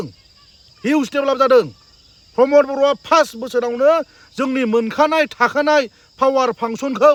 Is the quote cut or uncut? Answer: uncut